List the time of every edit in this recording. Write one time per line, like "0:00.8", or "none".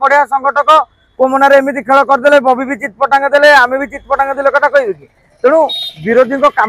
none